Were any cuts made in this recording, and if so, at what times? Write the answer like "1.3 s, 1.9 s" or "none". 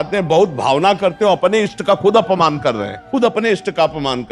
2.9 s